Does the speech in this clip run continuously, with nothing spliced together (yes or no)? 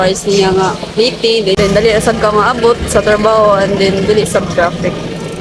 yes